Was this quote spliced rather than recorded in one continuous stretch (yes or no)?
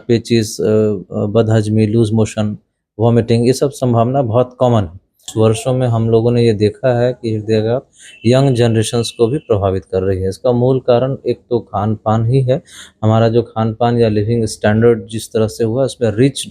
yes